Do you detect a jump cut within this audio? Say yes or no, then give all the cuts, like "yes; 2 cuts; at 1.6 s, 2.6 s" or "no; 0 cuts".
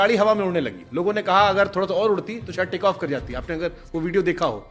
no; 0 cuts